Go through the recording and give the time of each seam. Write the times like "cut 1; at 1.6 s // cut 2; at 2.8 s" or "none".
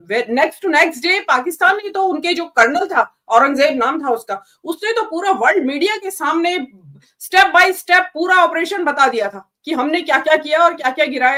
none